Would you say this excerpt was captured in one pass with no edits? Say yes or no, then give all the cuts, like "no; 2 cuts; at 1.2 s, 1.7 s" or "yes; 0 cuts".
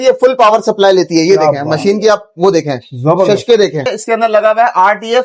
no; 1 cut; at 3.9 s